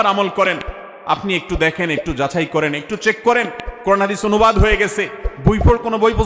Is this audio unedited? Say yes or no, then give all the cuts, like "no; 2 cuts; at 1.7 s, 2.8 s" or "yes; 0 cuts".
yes; 0 cuts